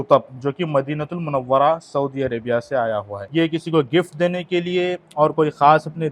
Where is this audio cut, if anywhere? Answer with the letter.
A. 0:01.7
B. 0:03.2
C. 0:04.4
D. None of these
B